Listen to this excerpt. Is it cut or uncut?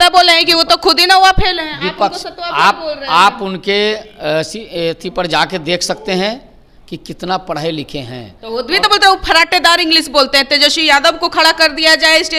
uncut